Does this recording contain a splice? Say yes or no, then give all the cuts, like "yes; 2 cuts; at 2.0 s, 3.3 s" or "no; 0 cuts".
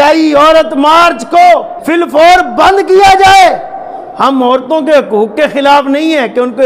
yes; 1 cut; at 1.8 s